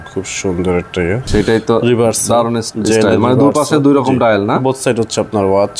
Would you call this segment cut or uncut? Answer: cut